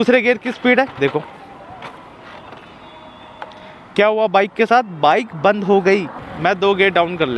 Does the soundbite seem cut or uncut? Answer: cut